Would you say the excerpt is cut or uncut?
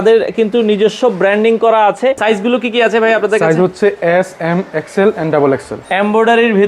cut